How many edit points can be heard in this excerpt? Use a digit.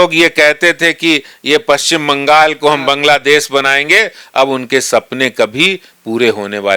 0